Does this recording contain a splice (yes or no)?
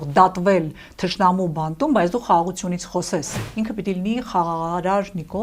yes